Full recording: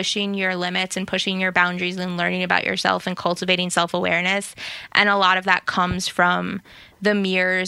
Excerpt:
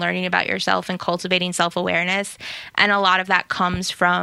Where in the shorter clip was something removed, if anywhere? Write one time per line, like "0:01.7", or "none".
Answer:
none